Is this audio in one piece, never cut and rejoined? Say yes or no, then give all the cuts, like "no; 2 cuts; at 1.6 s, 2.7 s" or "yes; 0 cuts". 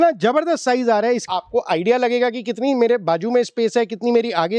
no; 1 cut; at 1.2 s